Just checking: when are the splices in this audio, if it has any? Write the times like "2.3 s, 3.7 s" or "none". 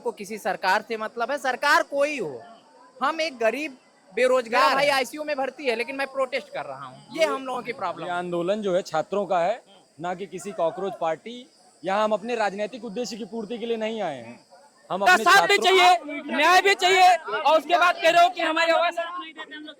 4.7 s, 15.1 s